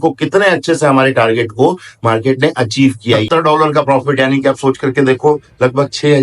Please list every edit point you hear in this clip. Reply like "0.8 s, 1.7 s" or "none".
3.2 s